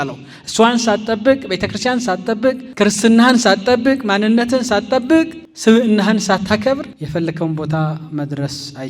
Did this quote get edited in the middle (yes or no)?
yes